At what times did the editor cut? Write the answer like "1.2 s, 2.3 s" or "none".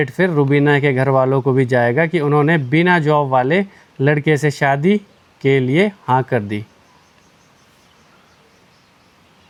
none